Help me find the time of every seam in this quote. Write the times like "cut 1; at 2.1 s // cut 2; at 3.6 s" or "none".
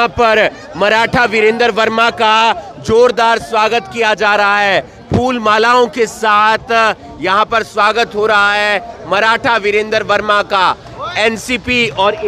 none